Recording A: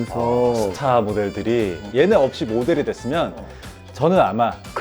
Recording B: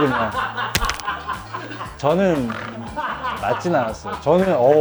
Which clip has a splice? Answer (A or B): A